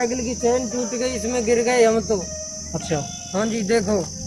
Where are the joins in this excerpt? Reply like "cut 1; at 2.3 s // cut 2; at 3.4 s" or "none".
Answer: none